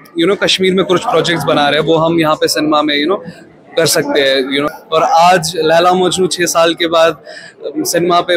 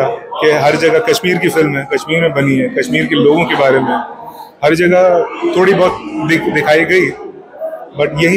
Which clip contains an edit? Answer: first; 1 cut; at 4.6 s

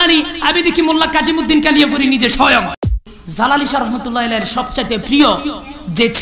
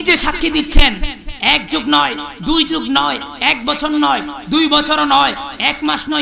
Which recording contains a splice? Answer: first; 1 cut; at 2.9 s

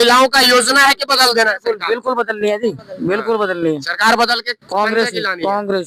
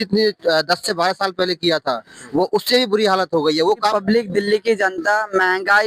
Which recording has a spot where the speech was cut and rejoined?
second; 1 cut; at 3.9 s

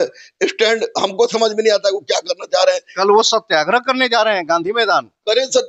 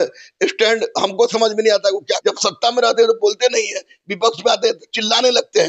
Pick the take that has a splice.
second; 1 cut; at 2.1 s

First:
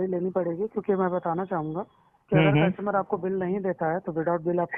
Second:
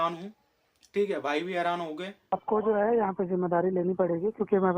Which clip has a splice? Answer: second; 1 cut; at 2.4 s

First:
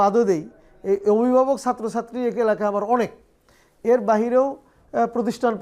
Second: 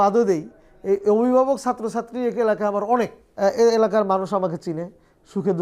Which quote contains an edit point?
second; 1 cut; at 3.2 s

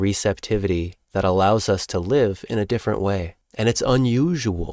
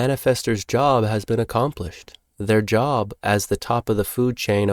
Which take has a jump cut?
first; 2 cuts; at 1.0 s, 3.4 s

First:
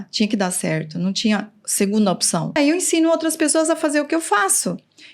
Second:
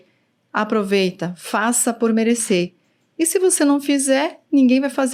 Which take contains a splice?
first; 1 cut; at 2.6 s

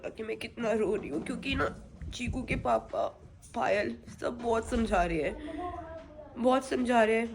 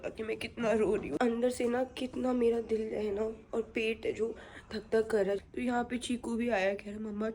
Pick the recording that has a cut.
second; 2 cuts; at 1.2 s, 5.4 s

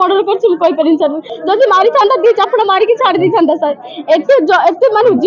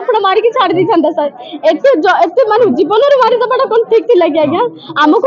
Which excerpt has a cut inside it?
first; 1 cut; at 1.3 s

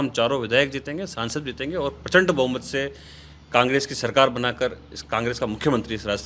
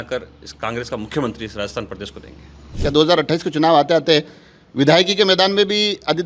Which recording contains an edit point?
second; 1 cut; at 2.7 s

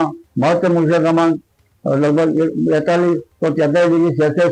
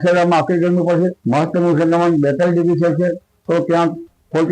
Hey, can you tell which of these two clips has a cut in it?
second; 1 cut; at 1.2 s

